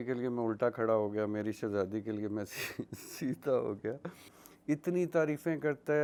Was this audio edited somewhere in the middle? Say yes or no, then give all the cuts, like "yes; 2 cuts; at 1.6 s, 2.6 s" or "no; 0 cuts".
no; 0 cuts